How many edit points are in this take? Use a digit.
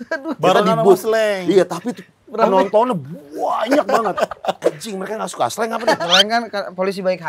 2